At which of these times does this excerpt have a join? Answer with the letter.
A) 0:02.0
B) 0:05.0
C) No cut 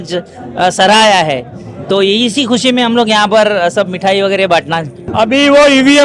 B